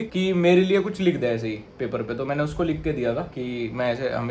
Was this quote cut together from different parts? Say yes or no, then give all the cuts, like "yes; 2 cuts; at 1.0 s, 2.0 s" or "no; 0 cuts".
yes; 1 cut; at 3.3 s